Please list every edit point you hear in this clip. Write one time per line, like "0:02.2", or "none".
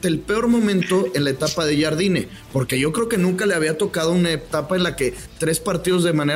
none